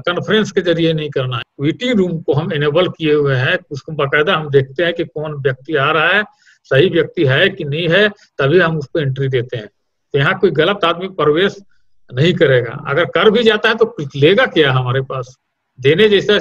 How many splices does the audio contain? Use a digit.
1